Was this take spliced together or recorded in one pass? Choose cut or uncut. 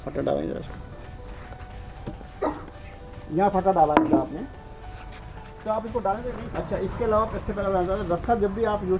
cut